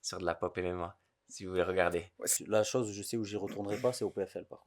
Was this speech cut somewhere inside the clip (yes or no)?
yes